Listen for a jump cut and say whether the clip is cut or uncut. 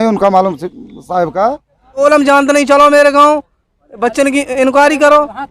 cut